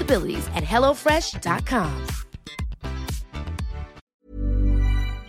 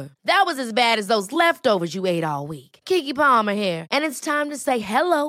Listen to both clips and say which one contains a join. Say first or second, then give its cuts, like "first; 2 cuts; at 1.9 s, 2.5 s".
first; 1 cut; at 4.1 s